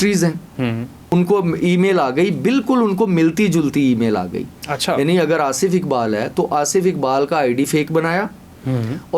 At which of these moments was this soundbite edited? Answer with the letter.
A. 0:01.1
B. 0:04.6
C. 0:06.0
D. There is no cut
A